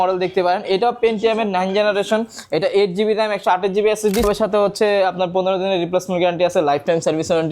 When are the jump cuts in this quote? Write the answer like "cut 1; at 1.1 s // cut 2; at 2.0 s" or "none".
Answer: cut 1; at 4.2 s